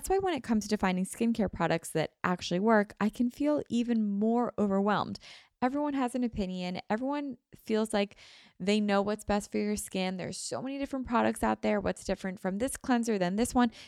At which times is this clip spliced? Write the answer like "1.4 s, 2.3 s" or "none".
none